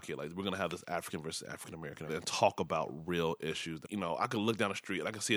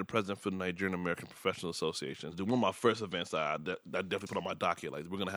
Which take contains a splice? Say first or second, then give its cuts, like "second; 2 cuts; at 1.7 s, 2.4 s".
first; 2 cuts; at 2.1 s, 3.8 s